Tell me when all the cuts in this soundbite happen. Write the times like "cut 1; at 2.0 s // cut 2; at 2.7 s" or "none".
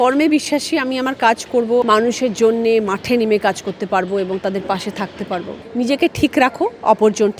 cut 1; at 1.8 s // cut 2; at 5.5 s